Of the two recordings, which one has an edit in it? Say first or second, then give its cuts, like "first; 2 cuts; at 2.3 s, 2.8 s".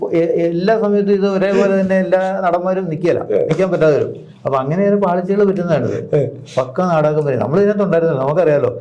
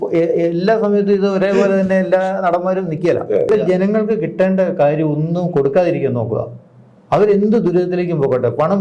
second; 1 cut; at 3.5 s